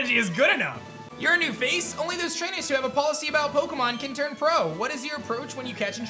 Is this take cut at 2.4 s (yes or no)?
no